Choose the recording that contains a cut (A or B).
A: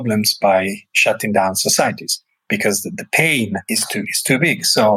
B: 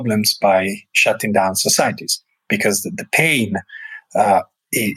A